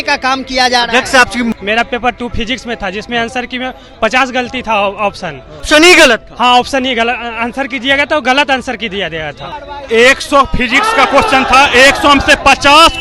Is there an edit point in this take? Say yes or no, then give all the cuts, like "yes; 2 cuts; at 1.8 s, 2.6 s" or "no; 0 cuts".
yes; 3 cuts; at 1.5 s, 5.6 s, 9.6 s